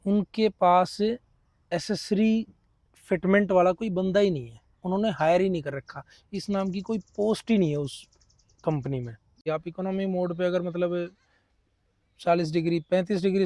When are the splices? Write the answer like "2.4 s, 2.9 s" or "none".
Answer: 9.3 s